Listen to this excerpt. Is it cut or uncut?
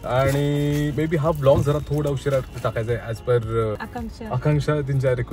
uncut